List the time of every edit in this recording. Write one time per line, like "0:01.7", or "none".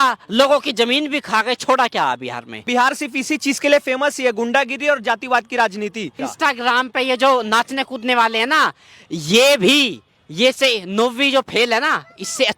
0:02.7
0:06.2